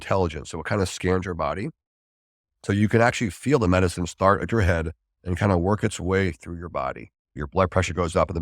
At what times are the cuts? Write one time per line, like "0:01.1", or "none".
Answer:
0:07.4